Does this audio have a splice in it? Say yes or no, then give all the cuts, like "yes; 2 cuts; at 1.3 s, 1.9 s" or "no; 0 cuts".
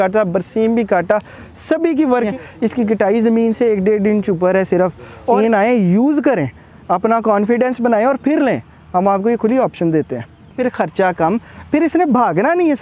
yes; 3 cuts; at 2.3 s, 5.4 s, 10.6 s